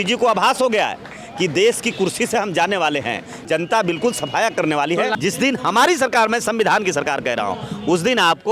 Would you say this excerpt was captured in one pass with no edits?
no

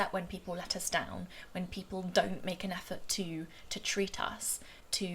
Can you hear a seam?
no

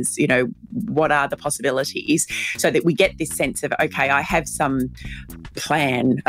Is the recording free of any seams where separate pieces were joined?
yes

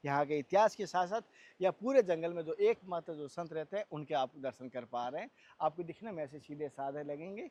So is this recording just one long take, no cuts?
yes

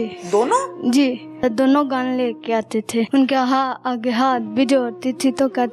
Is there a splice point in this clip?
yes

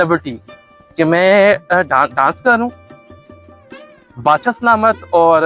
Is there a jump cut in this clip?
no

